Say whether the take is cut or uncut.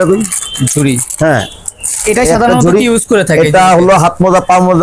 uncut